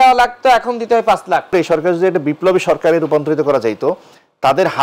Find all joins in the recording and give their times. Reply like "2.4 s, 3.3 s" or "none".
1.5 s

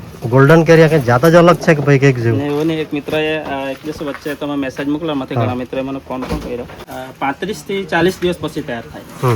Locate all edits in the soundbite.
6.8 s

